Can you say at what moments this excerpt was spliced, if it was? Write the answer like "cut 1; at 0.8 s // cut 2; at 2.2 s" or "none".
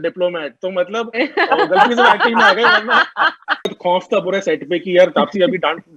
cut 1; at 3.7 s